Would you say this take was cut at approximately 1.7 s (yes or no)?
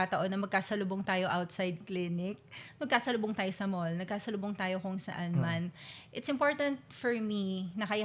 no